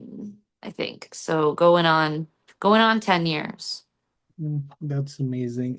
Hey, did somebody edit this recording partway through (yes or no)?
no